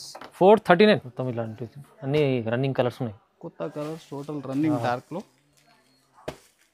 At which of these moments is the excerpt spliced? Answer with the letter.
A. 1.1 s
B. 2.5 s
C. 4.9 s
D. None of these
A